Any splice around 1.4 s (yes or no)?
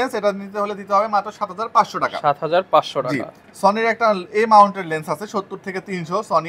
no